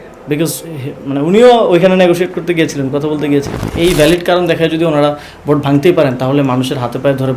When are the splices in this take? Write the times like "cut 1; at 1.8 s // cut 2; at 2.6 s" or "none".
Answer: cut 1; at 3.6 s